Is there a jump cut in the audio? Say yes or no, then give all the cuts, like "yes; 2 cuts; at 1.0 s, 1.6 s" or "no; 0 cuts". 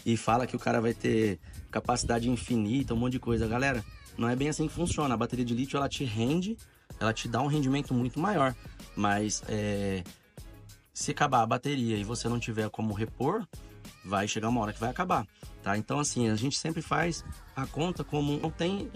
no; 0 cuts